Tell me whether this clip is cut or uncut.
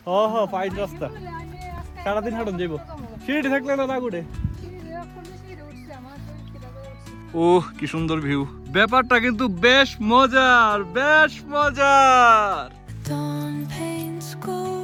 uncut